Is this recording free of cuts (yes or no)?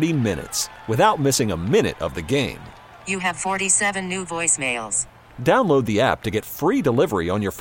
yes